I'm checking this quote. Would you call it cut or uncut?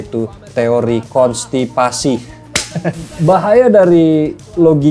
cut